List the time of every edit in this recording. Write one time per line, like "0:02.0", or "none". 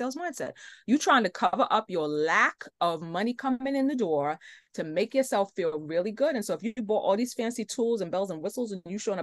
none